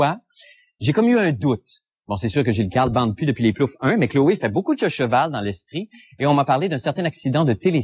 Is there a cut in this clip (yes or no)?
yes